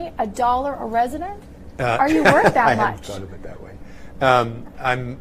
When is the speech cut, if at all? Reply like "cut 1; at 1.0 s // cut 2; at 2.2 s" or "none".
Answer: none